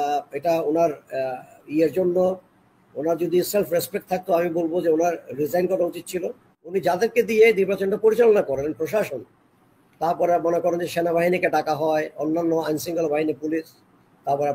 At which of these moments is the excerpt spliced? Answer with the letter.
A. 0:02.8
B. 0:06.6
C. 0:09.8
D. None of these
B